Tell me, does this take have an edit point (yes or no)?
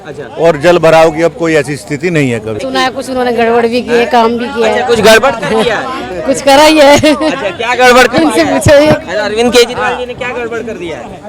yes